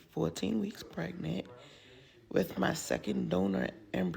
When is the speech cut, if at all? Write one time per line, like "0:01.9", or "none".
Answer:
0:01.9